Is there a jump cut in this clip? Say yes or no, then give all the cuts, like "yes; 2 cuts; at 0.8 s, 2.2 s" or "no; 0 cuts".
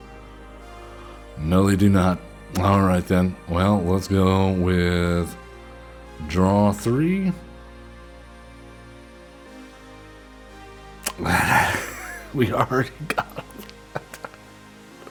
no; 0 cuts